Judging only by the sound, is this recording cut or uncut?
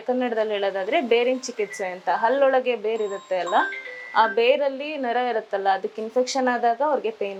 uncut